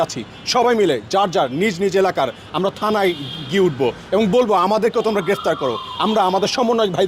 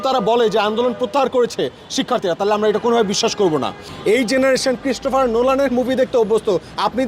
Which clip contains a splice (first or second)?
second